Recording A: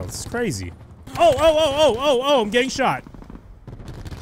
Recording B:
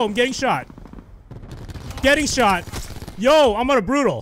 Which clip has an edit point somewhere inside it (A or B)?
A